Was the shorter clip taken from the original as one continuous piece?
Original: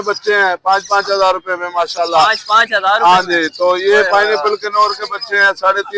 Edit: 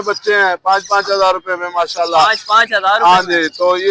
yes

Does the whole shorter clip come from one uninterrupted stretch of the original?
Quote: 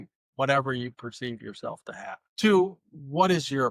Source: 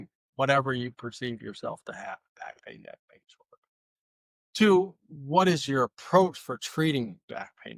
no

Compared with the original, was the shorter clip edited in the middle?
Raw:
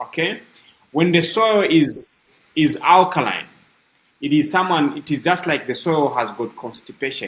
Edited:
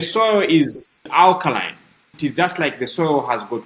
yes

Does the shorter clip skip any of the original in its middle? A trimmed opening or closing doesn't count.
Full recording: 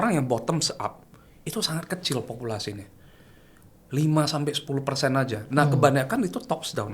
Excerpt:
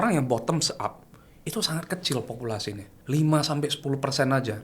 yes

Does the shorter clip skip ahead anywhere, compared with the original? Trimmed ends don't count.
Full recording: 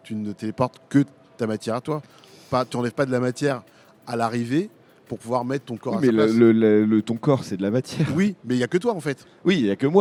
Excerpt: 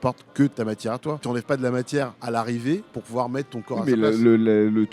yes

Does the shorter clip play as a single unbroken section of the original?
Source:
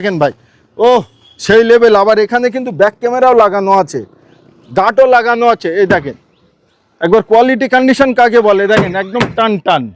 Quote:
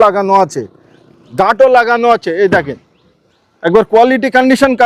yes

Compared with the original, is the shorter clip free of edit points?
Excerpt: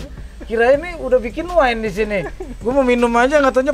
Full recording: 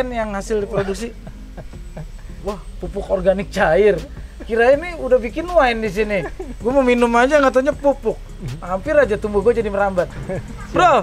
yes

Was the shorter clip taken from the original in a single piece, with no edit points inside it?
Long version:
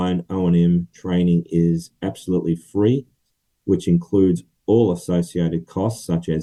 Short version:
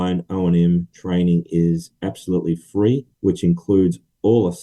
no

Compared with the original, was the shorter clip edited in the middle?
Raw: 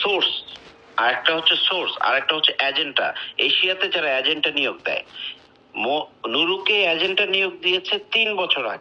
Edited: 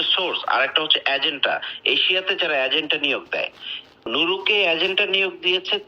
yes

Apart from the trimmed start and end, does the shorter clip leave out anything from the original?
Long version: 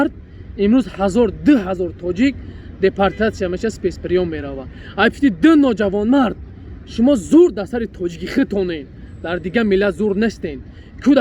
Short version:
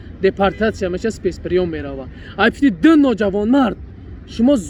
no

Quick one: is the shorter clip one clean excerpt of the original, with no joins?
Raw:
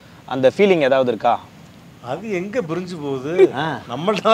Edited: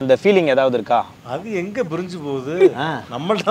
no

